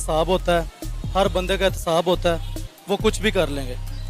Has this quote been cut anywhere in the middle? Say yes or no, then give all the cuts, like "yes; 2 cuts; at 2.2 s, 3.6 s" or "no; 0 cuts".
no; 0 cuts